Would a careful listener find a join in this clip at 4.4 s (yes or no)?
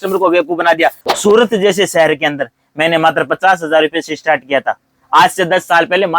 no